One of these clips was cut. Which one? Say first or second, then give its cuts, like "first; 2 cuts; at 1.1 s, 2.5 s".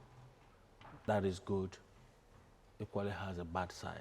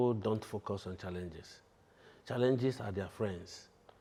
first; 1 cut; at 1.0 s